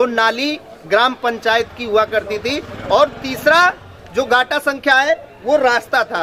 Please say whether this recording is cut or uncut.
uncut